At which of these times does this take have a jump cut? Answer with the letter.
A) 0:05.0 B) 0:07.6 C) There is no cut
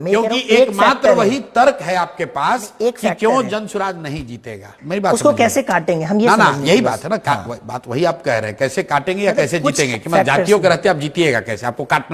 C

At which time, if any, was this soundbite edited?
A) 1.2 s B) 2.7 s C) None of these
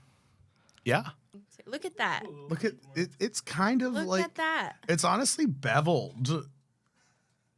A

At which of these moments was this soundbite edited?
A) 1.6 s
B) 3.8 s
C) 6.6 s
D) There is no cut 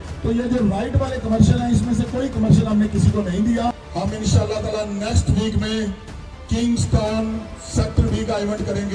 B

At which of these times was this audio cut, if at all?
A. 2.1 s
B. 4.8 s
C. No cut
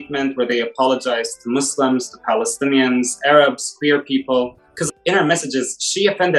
B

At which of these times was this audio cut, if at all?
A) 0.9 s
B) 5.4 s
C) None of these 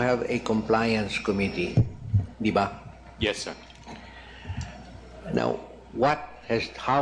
A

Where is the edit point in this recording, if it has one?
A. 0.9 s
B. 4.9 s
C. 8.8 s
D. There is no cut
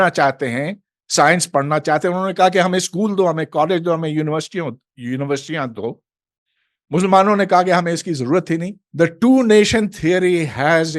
C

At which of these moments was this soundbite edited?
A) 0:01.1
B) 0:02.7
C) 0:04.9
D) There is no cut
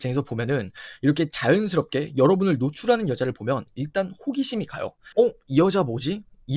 D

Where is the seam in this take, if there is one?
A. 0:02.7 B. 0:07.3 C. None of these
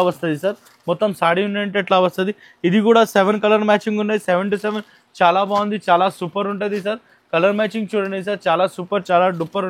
C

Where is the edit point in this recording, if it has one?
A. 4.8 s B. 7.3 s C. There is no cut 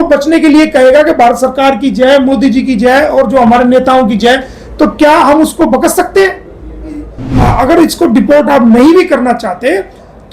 B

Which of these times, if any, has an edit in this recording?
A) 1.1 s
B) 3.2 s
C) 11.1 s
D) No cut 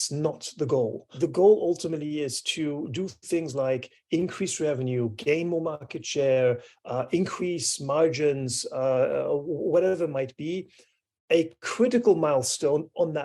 A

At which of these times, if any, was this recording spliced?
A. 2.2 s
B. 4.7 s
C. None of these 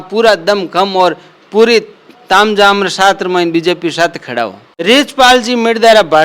B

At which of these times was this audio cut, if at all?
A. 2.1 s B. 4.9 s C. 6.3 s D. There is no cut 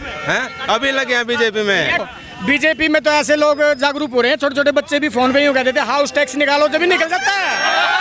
A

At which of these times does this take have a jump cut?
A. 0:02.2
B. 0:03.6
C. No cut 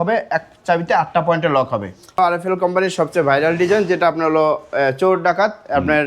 A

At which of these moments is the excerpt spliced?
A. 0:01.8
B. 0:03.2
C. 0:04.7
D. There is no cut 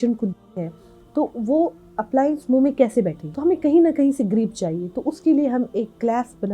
B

